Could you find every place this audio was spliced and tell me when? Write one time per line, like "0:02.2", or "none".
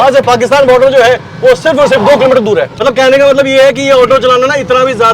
0:02.7